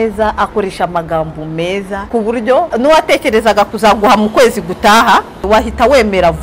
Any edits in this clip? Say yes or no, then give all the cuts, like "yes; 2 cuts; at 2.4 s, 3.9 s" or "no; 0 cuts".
yes; 3 cuts; at 2.0 s, 2.7 s, 5.3 s